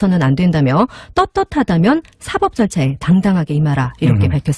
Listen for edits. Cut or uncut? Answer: cut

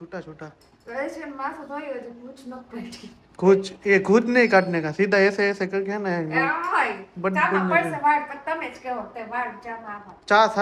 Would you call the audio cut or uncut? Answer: uncut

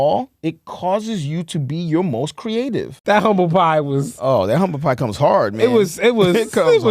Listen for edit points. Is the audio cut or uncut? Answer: cut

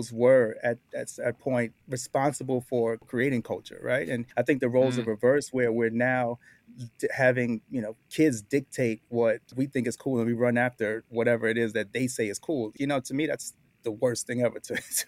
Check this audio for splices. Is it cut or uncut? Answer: cut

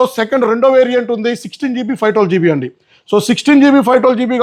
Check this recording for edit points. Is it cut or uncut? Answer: uncut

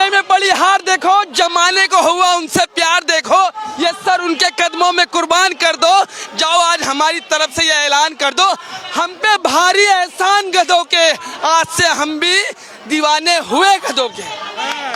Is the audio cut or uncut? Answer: uncut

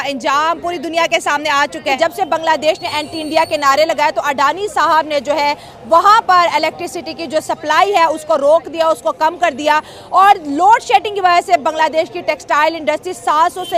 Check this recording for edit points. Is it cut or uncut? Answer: cut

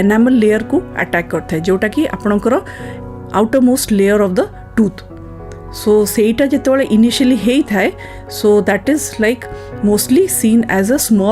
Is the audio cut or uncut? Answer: uncut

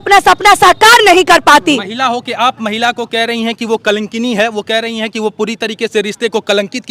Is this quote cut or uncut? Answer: uncut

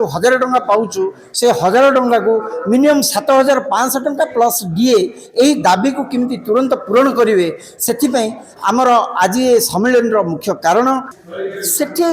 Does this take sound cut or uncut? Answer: cut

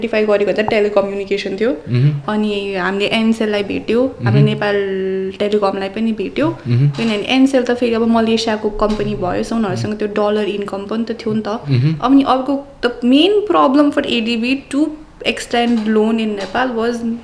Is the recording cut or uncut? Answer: uncut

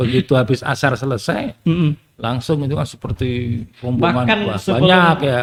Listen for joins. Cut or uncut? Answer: uncut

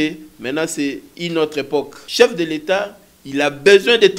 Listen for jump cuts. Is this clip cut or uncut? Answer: cut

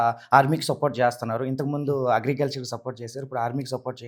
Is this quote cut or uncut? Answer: uncut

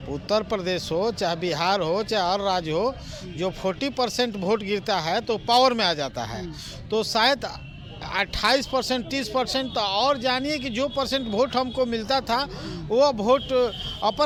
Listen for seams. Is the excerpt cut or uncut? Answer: uncut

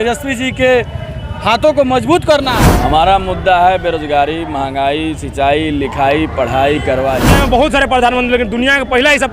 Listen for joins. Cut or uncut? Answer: cut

